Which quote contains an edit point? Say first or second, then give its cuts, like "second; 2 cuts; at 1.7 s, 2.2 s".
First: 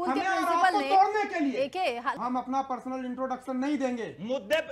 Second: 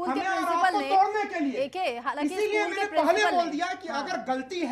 first; 1 cut; at 2.1 s